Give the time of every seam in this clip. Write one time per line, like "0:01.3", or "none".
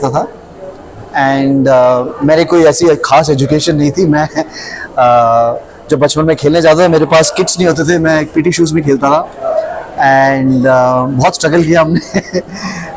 none